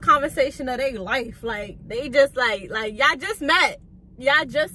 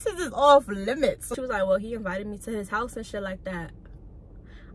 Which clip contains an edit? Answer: second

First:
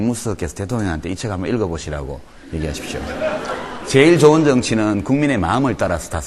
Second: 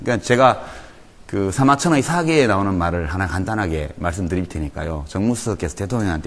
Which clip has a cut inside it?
second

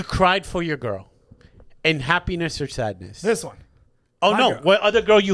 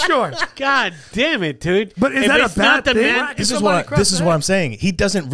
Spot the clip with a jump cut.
second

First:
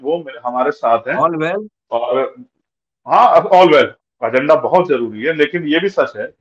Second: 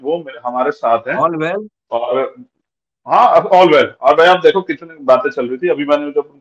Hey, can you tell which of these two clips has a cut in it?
first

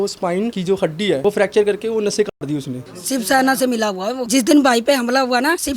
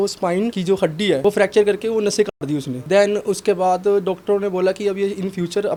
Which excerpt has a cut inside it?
first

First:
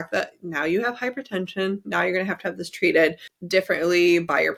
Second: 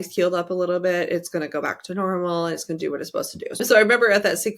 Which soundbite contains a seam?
second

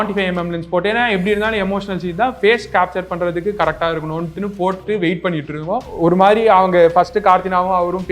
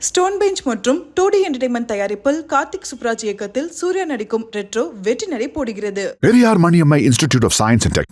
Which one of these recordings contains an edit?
first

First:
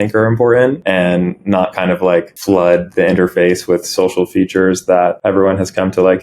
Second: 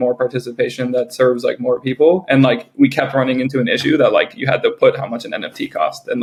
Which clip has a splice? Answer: first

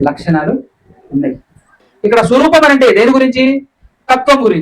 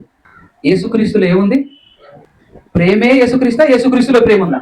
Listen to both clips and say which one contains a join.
first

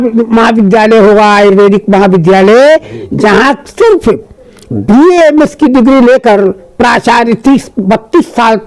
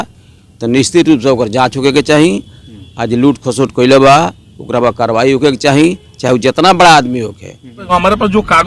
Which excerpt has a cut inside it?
second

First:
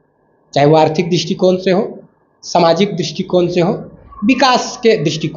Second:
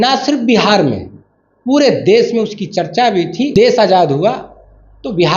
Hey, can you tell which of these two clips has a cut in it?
second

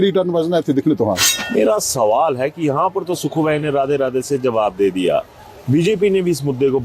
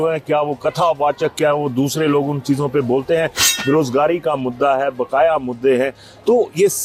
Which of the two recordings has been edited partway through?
first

